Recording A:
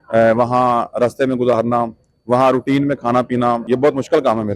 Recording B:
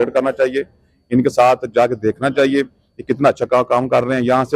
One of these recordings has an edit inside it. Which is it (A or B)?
A